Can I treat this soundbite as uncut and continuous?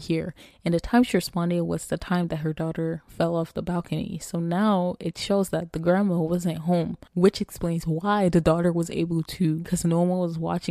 no; 2 cuts; at 7.0 s, 9.7 s

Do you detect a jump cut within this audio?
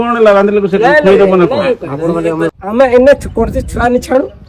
yes; 1 cut; at 2.5 s

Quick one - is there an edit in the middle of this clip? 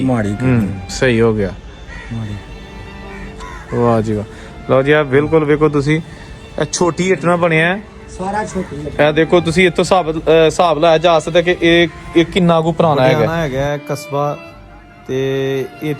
yes; 1 cut; at 13.3 s

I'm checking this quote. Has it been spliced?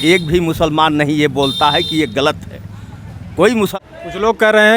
yes; 1 cut; at 3.7 s

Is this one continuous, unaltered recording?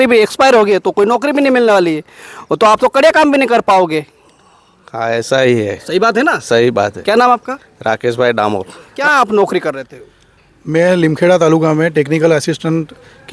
no; 1 cut; at 8.9 s

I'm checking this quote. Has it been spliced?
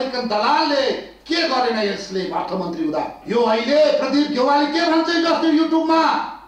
yes; 1 cut; at 3.2 s

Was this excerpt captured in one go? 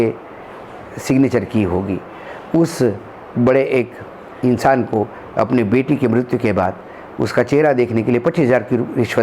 yes; 0 cuts

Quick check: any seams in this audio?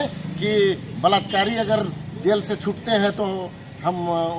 no; 0 cuts

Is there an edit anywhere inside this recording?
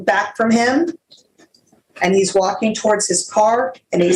no; 0 cuts

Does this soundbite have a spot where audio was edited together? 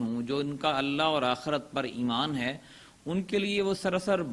no; 0 cuts

